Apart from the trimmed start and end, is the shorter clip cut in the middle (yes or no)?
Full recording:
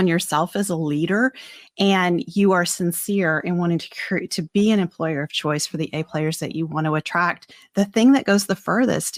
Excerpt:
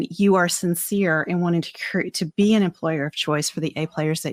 no